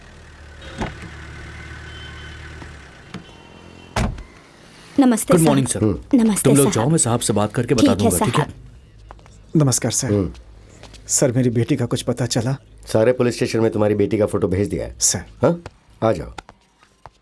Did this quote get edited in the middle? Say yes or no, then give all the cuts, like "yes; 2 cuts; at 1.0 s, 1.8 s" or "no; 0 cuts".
no; 0 cuts